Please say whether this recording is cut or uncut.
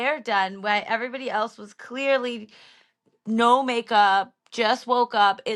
uncut